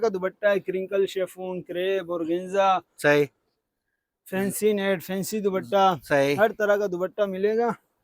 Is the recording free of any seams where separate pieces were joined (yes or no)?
yes